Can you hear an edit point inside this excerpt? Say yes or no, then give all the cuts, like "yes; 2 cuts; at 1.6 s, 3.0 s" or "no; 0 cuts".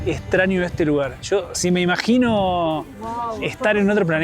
no; 0 cuts